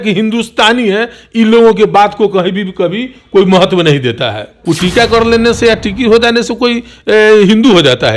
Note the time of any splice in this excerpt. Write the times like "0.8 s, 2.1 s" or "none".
4.5 s